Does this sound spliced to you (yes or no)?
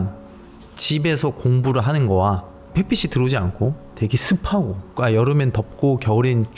no